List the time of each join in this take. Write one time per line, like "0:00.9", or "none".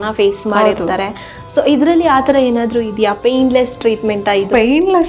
none